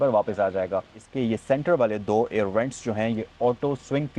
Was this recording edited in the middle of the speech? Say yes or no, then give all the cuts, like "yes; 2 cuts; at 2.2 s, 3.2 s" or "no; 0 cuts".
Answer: yes; 1 cut; at 1.0 s